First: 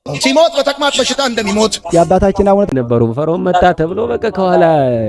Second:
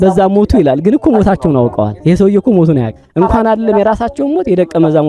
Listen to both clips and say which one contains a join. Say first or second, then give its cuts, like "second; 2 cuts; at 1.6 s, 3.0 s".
first; 1 cut; at 2.7 s